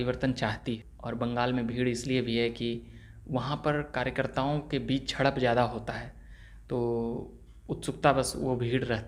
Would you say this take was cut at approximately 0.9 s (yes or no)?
yes